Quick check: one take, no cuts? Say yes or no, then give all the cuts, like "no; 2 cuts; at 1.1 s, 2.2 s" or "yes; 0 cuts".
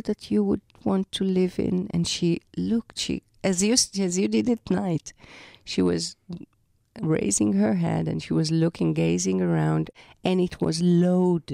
no; 1 cut; at 9.9 s